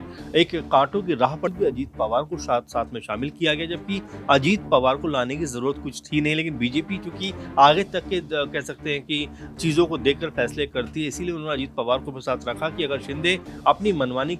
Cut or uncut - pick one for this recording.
cut